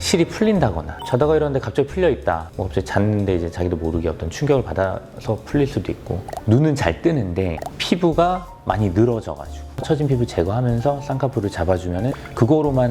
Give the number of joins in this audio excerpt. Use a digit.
3